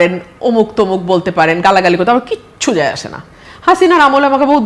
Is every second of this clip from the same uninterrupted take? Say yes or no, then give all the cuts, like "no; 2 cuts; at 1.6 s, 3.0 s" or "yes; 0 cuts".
yes; 0 cuts